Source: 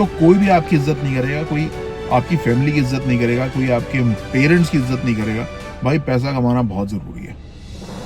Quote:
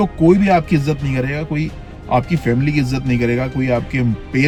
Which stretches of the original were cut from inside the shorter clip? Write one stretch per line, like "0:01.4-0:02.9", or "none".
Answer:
none